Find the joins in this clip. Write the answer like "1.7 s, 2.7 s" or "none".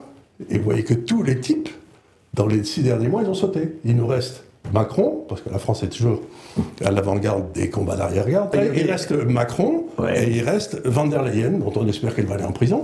8.5 s

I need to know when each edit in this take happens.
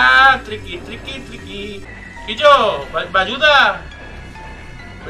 1.8 s

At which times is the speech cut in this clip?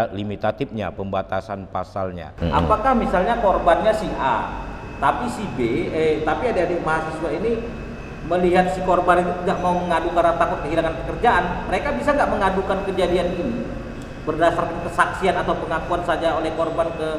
2.3 s

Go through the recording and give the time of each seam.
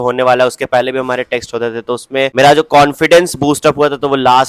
2.3 s

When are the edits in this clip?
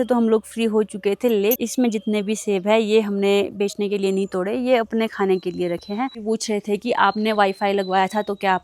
1.6 s, 6.2 s

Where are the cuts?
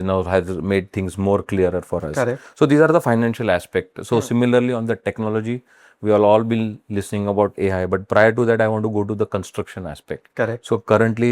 none

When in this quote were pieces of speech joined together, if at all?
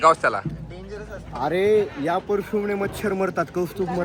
none

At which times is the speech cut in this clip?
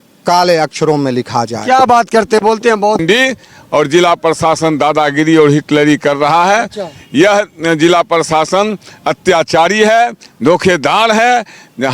3.0 s

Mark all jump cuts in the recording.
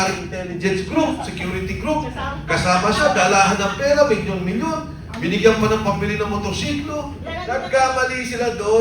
7.3 s

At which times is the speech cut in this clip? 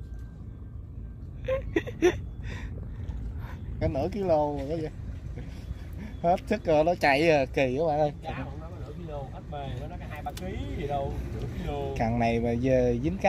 3.7 s

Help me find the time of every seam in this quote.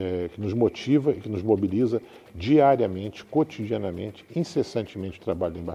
none

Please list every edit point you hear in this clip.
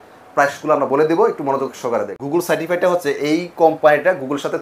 2.1 s

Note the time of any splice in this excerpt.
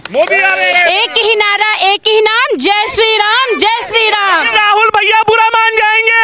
none

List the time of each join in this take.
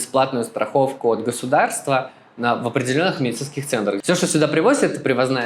4.0 s

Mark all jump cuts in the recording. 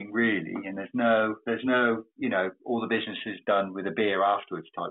none

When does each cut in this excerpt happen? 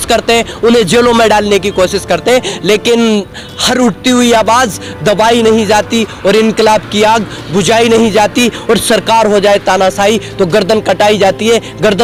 none

